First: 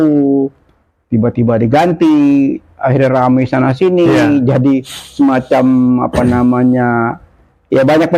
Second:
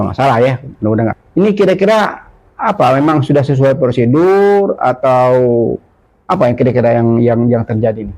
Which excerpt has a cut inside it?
second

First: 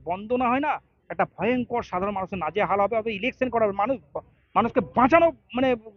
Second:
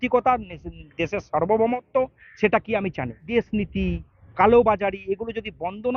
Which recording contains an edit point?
second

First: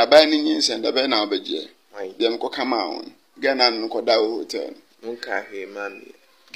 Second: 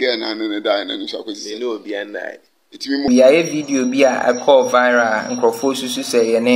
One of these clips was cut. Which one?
second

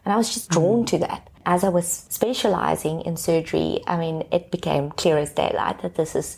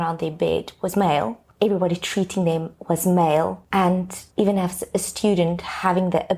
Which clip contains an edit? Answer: second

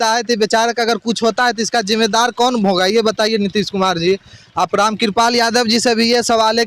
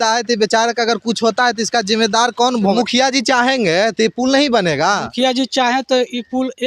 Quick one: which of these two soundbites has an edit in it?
second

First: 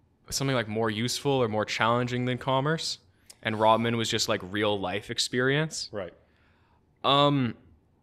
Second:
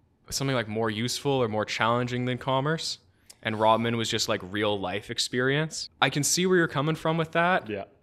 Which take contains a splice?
second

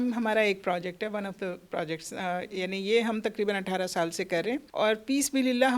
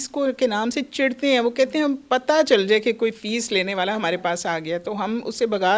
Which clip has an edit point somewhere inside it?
first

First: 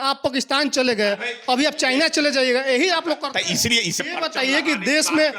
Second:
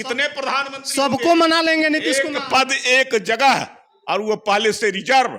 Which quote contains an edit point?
first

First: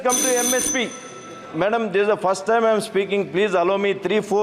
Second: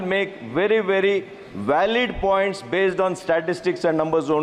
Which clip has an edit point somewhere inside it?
first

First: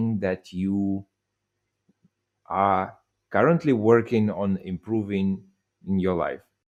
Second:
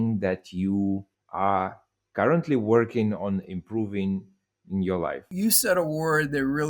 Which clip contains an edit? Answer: second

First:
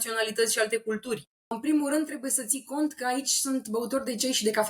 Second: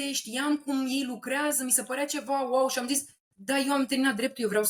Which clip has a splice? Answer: first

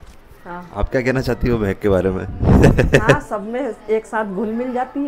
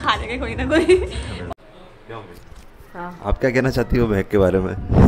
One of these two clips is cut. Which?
second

